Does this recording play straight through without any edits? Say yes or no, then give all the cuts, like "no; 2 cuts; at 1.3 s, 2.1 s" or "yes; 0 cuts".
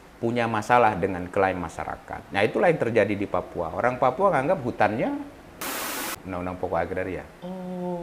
no; 1 cut; at 5.9 s